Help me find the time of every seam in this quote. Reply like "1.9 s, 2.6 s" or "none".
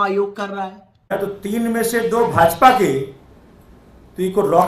1.1 s

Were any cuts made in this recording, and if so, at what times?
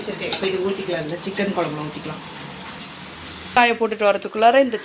3.6 s

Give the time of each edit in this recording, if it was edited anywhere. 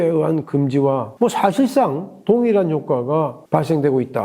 1.1 s

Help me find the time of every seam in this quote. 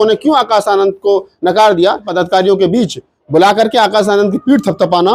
2.1 s

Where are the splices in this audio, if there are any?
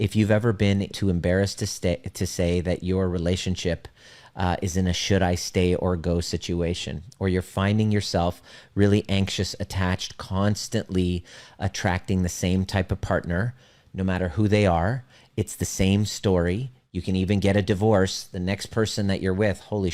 0.9 s

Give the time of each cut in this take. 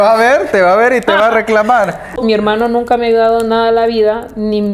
2.2 s

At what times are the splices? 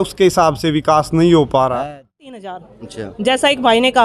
2.5 s

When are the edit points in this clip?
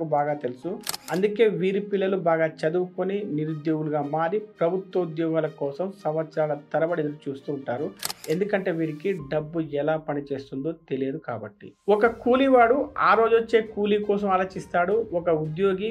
0.9 s, 11.7 s

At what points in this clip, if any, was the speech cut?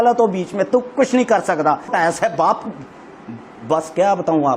1.9 s

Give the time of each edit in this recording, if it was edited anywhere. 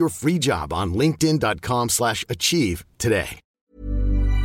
3.4 s

